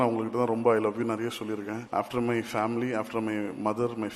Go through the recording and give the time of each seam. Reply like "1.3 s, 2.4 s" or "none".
1.8 s